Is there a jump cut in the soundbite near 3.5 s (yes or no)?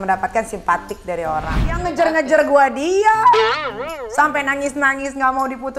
no